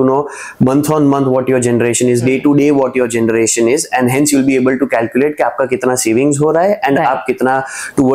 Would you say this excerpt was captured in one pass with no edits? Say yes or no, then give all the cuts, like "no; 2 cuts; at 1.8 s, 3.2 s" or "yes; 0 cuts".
yes; 0 cuts